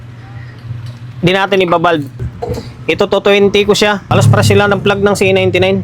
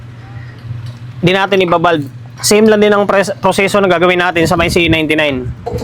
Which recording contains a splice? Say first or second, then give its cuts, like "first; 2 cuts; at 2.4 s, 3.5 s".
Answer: first; 2 cuts; at 2.3 s, 4.1 s